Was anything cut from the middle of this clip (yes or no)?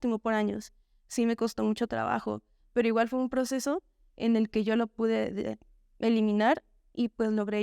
no